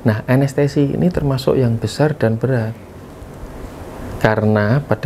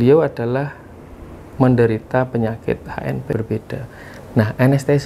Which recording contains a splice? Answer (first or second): second